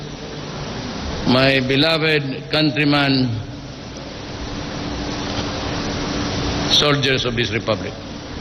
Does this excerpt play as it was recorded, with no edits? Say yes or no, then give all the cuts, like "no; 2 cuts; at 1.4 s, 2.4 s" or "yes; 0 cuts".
no; 1 cut; at 1.2 s